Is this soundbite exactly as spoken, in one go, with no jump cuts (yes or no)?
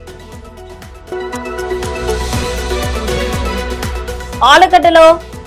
yes